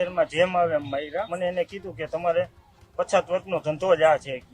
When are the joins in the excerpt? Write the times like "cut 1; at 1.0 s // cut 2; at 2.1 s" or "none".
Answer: cut 1; at 1.3 s